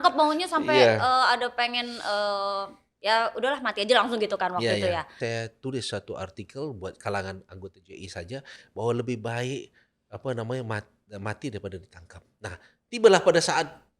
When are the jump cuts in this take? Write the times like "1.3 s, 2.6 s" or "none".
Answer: 5.0 s